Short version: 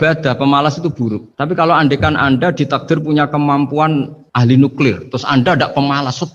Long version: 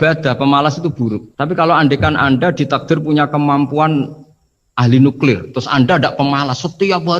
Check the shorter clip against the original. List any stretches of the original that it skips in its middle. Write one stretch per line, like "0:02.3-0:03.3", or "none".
0:04.2-0:04.6